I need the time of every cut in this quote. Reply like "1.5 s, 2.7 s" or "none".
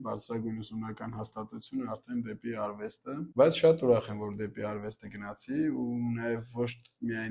3.3 s